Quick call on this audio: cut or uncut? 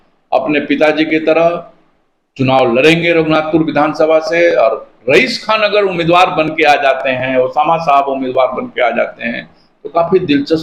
uncut